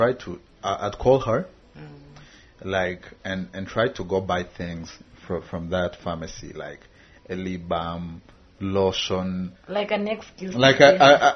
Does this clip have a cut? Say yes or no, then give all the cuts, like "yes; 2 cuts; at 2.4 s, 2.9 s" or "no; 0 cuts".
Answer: no; 0 cuts